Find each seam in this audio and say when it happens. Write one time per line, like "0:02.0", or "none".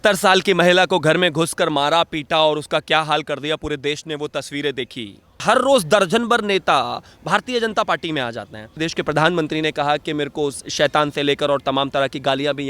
0:05.4
0:08.8